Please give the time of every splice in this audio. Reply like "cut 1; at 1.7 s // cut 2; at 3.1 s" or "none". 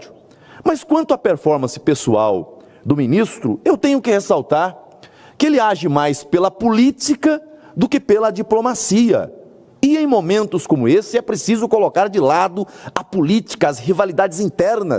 none